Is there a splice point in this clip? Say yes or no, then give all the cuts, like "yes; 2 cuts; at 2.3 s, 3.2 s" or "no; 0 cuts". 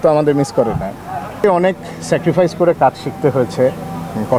yes; 1 cut; at 1.4 s